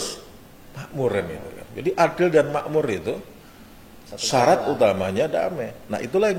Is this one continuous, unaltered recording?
yes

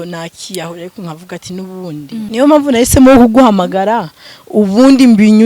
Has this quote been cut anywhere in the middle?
yes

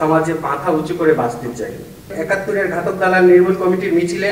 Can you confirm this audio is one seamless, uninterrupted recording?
no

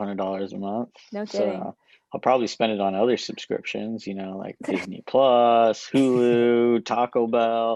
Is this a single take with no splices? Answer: yes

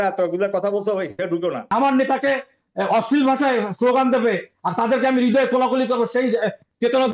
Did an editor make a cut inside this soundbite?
yes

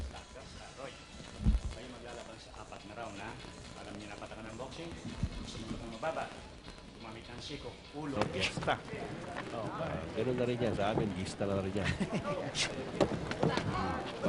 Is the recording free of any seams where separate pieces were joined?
yes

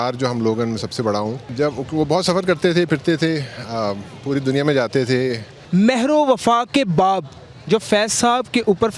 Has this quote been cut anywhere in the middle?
yes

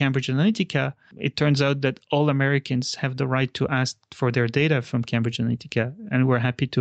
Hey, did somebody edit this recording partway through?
no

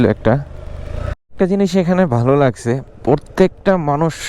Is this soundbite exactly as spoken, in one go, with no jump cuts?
no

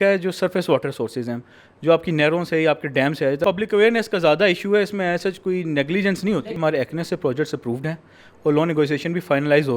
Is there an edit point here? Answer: yes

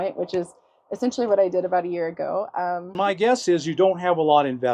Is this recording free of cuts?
no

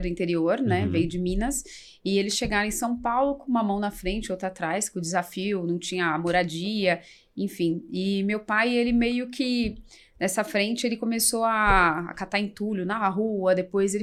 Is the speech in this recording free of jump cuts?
yes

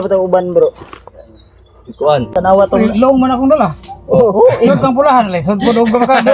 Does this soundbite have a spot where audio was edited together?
yes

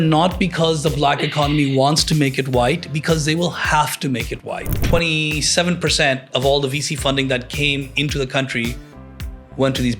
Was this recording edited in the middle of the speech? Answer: yes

